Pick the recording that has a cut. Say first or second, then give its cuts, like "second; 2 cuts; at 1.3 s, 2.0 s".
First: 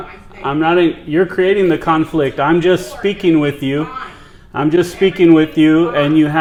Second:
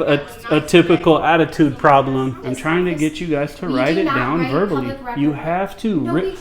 second; 1 cut; at 2.4 s